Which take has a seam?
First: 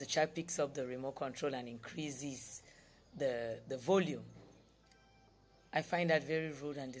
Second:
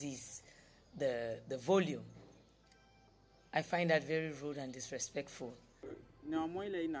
second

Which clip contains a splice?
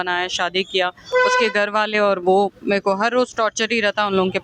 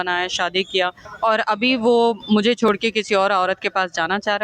second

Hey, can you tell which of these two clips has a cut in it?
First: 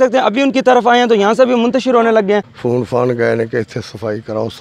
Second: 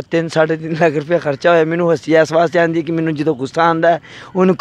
first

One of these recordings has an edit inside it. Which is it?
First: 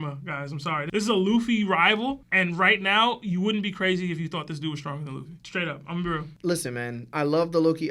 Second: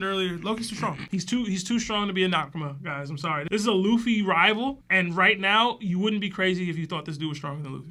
first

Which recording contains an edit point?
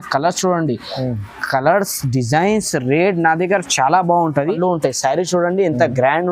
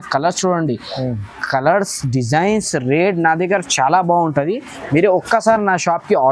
first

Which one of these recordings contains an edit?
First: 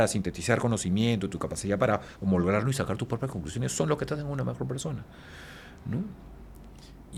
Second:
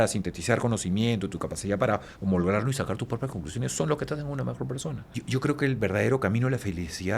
second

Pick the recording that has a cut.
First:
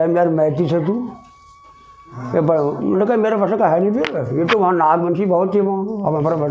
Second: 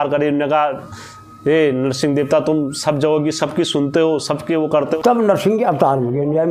second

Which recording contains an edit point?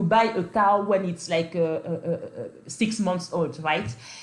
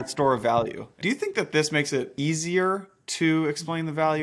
second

